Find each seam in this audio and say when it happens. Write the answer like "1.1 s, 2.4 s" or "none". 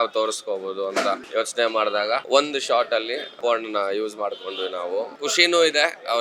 1.2 s, 2.2 s, 3.4 s, 5.1 s